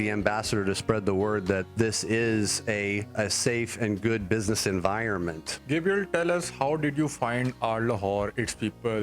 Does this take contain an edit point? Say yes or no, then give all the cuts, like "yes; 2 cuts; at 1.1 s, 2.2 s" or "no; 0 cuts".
yes; 3 cuts; at 1.7 s, 3.1 s, 5.5 s